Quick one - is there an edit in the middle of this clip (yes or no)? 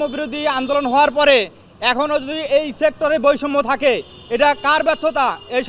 no